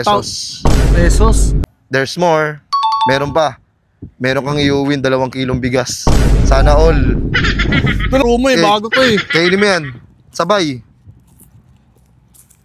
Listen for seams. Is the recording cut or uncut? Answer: cut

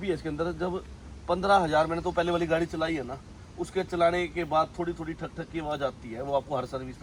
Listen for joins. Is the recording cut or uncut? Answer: uncut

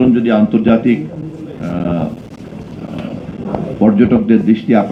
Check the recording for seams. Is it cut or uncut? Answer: uncut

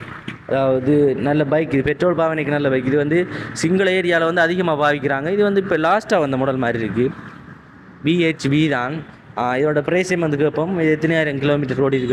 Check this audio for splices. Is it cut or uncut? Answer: uncut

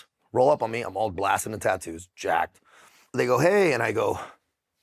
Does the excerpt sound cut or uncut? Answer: cut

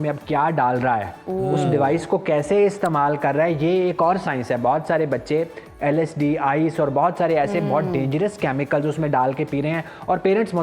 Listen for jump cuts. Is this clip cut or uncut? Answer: uncut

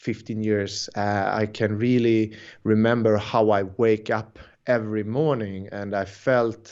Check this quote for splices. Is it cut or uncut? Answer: uncut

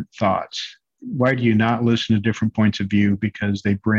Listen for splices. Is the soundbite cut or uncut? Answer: cut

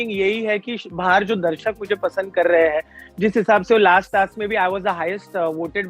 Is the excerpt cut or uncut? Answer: uncut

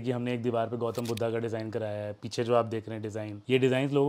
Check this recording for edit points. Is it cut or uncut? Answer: uncut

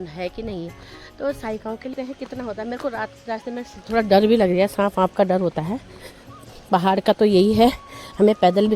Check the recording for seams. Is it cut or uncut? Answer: cut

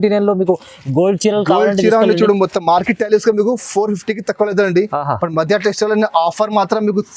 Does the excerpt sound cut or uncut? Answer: uncut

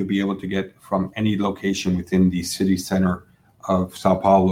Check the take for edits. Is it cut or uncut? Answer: uncut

